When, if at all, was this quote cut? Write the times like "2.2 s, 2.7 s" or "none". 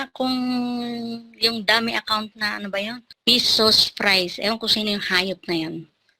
3.1 s